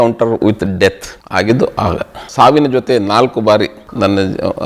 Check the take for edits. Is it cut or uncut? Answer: cut